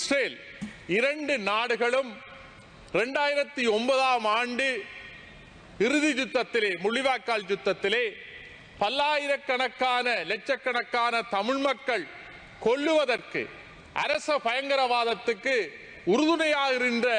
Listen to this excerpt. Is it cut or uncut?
uncut